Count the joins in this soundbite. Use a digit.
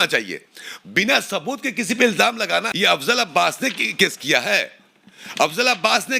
1